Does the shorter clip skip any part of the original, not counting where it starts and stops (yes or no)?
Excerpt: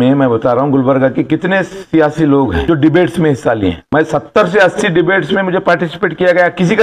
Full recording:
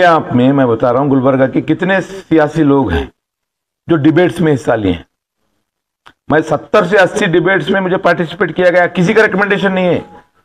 yes